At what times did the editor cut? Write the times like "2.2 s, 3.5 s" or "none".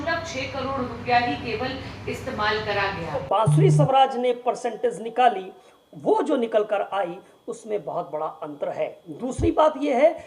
3.2 s